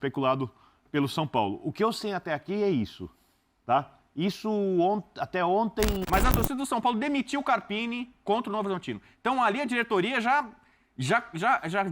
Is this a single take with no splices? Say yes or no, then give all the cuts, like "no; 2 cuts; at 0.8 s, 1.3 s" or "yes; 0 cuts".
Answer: no; 1 cut; at 6.0 s